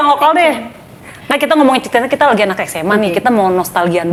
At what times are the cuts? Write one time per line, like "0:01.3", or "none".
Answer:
none

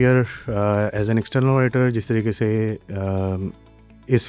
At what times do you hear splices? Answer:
none

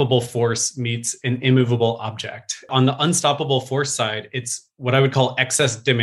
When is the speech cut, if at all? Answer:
0:02.7

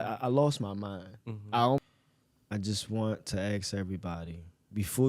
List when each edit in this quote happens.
0:01.8

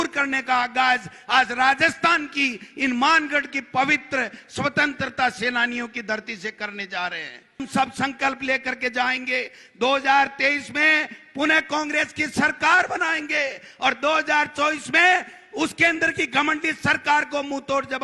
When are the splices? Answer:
0:07.6

